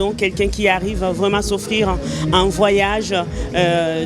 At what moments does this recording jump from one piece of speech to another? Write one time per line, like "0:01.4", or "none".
none